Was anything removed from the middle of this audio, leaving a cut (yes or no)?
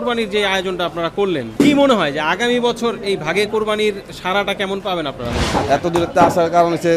yes